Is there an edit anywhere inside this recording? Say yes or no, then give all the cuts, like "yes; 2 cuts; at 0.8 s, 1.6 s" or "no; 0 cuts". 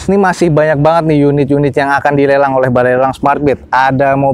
no; 0 cuts